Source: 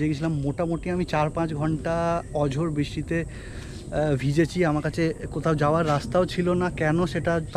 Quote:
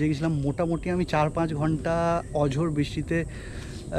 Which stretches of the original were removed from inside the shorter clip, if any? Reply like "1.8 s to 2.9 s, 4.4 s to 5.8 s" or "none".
none